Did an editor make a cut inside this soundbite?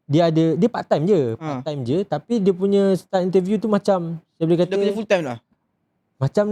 no; 0 cuts

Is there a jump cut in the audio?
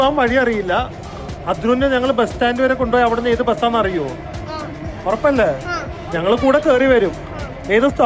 no; 0 cuts

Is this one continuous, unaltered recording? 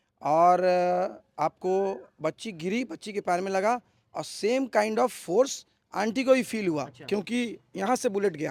yes; 0 cuts

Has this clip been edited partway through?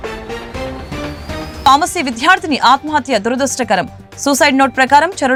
no; 0 cuts

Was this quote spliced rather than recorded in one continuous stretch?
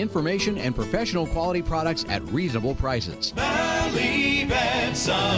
yes; 1 cut; at 3.2 s

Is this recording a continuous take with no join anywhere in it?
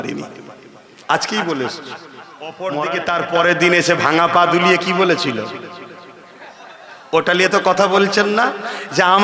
no; 1 cut; at 2.5 s

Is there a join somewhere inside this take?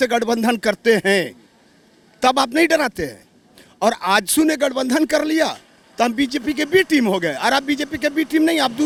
no; 0 cuts

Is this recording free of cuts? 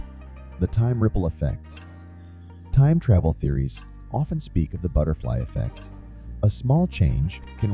yes; 0 cuts

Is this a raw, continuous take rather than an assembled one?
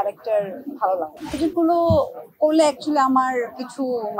no; 1 cut; at 1.4 s

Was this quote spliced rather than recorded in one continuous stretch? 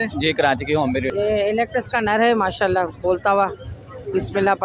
yes; 1 cut; at 1.1 s

